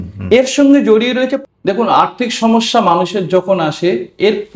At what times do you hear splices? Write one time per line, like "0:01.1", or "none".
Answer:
0:01.4